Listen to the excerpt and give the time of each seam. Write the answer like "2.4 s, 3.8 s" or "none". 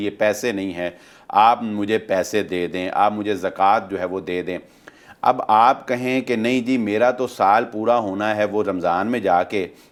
none